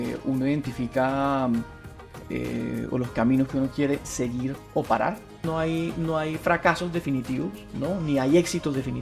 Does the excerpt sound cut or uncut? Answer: cut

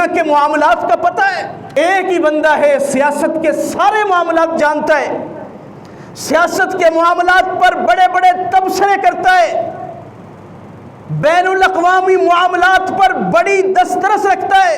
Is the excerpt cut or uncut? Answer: cut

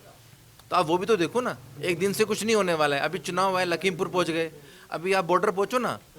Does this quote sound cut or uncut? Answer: cut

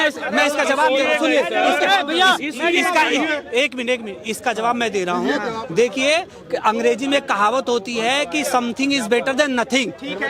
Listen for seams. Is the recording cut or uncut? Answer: uncut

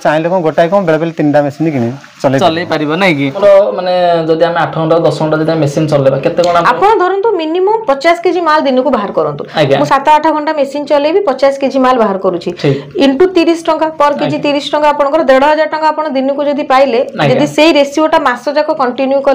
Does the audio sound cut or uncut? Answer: cut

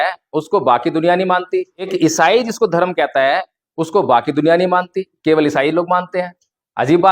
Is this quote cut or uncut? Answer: cut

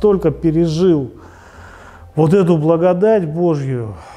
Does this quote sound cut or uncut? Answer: uncut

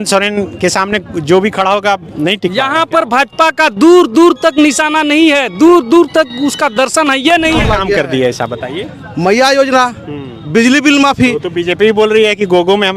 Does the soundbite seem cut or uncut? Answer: cut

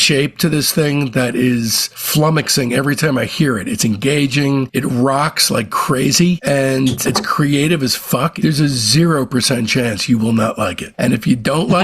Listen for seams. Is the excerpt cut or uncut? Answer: cut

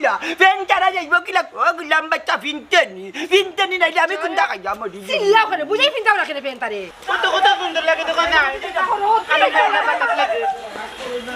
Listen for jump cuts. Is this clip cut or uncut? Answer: cut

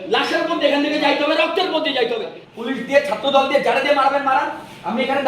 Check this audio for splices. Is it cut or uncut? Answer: cut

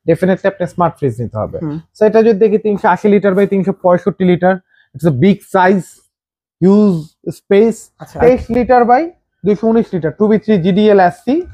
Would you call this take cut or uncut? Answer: cut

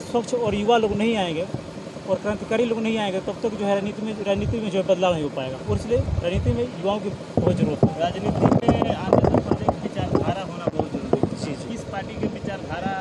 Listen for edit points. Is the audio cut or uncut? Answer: uncut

